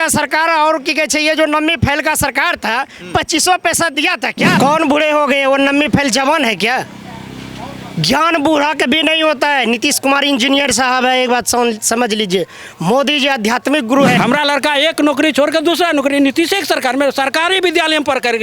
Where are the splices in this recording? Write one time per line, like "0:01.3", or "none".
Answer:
0:04.6
0:14.2